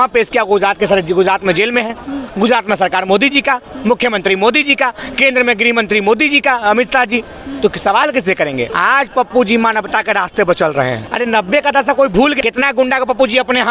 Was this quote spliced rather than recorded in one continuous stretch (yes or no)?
yes